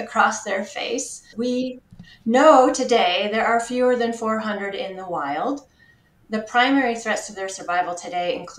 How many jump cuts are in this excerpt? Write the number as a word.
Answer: one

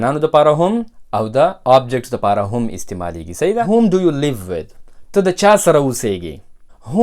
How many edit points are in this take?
one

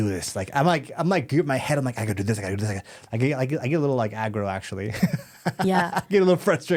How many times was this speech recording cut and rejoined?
zero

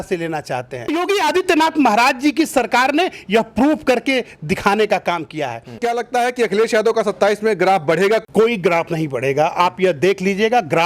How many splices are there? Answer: three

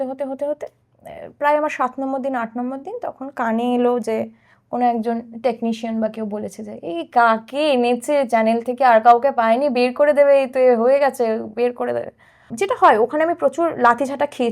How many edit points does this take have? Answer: one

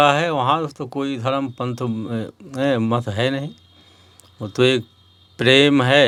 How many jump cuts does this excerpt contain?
zero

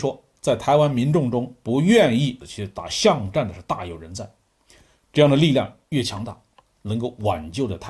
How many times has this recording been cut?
zero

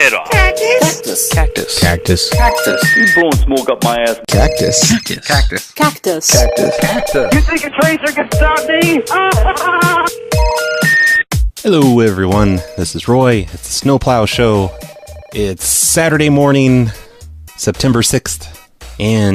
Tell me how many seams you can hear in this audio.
one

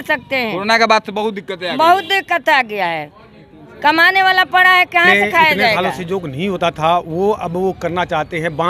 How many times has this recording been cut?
one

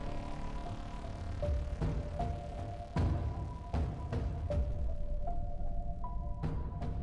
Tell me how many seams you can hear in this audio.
zero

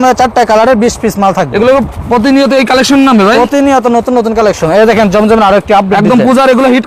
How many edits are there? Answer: zero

